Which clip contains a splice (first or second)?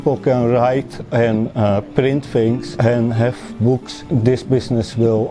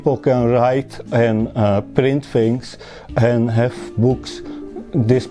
first